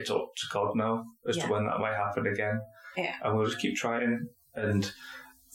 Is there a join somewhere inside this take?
no; 0 cuts

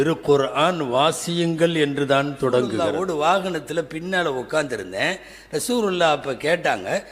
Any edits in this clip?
yes; 1 cut; at 2.9 s

